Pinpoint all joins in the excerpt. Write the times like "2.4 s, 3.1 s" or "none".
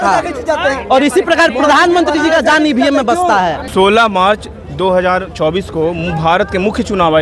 3.6 s